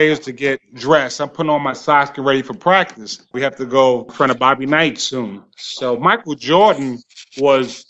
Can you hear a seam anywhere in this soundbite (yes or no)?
yes